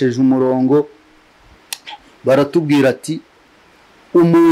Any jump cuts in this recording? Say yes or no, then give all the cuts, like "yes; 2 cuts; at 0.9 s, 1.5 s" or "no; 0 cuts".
no; 0 cuts